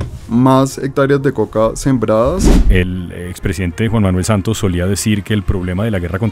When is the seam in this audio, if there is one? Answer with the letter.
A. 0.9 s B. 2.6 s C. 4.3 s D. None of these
B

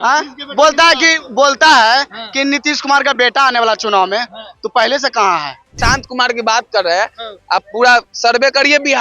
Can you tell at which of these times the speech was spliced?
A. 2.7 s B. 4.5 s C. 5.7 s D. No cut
C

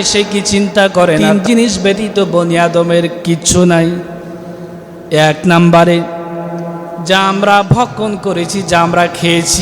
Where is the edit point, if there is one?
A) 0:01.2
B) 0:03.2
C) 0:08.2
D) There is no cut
A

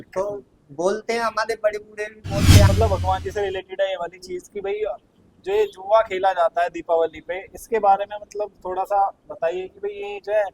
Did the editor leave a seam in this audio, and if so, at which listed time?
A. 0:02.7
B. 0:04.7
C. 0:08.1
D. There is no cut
A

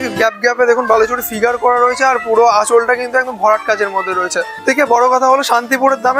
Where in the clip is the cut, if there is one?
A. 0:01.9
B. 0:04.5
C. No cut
B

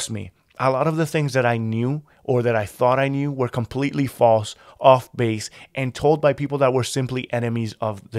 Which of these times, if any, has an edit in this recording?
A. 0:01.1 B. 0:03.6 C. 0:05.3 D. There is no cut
D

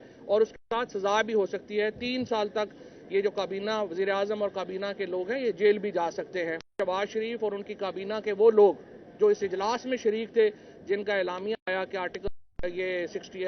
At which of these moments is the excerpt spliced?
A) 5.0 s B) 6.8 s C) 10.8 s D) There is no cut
B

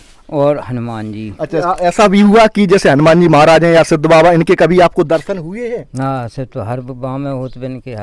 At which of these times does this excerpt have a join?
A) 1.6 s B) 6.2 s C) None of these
A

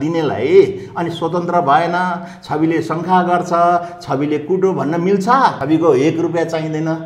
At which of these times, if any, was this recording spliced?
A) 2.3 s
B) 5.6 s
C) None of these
B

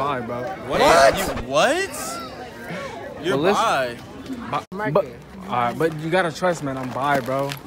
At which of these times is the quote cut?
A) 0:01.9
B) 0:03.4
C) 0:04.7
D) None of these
C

